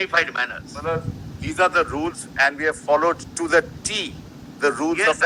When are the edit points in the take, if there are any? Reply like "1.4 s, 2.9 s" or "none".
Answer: none